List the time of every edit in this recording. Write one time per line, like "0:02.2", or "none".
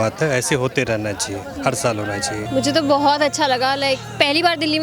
0:02.4